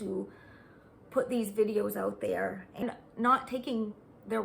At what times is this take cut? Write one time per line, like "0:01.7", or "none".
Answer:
0:02.8